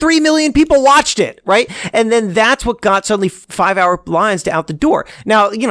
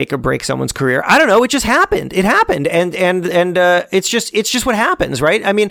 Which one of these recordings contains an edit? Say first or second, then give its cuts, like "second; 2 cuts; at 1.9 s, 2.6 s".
first; 1 cut; at 3.4 s